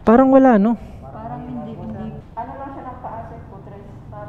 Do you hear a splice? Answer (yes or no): yes